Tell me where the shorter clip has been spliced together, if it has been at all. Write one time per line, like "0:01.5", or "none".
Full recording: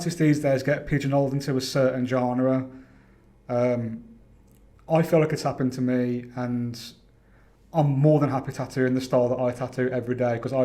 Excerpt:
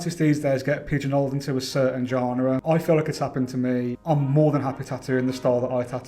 0:02.6
0:04.0